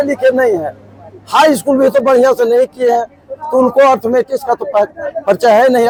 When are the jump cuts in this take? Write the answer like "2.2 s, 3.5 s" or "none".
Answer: none